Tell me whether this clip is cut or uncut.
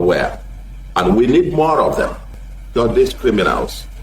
cut